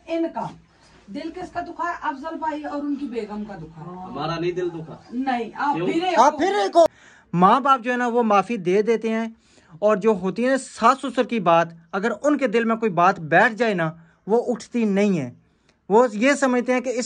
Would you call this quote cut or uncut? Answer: cut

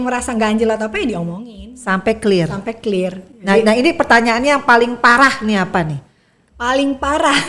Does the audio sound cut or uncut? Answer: uncut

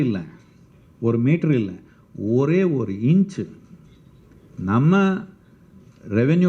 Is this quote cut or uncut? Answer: uncut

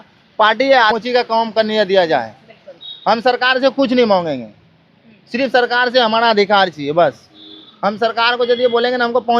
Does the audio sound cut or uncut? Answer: cut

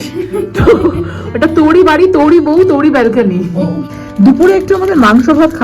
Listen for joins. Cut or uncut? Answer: cut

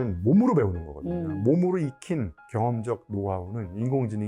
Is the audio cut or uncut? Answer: uncut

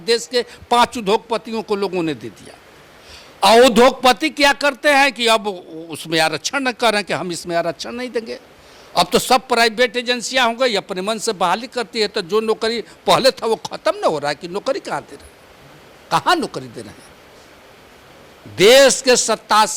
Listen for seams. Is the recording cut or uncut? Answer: uncut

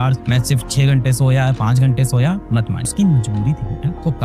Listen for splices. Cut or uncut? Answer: cut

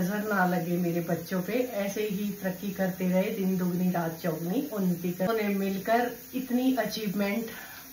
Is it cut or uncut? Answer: cut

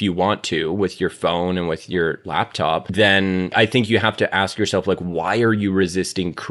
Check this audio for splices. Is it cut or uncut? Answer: cut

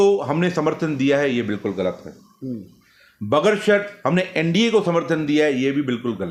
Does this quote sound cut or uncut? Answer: uncut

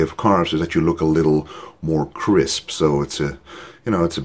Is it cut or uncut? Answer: uncut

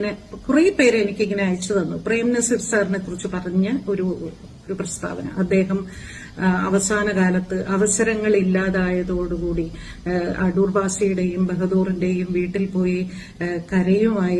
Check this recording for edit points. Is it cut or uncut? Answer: uncut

